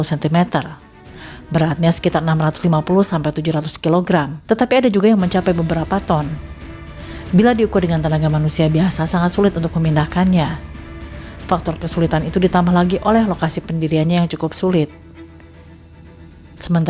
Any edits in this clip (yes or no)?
yes